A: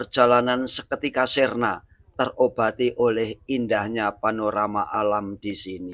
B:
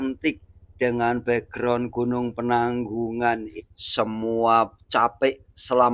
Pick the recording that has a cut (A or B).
B